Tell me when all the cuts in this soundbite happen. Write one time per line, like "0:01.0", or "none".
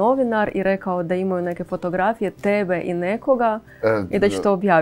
none